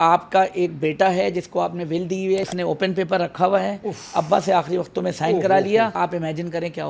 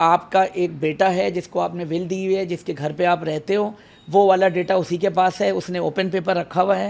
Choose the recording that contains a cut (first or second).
first